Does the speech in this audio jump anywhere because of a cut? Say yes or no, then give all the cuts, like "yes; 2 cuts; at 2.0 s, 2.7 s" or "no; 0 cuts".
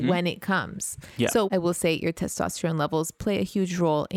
yes; 1 cut; at 1.5 s